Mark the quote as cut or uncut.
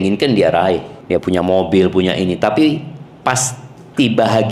cut